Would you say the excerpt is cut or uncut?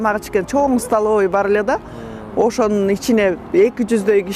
uncut